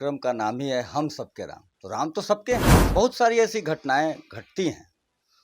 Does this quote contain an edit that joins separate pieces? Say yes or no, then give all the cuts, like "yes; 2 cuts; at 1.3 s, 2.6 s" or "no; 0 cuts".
yes; 1 cut; at 2.8 s